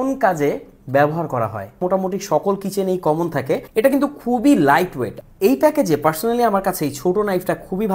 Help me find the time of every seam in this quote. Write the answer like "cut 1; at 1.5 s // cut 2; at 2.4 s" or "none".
cut 1; at 1.8 s // cut 2; at 3.6 s // cut 3; at 5.2 s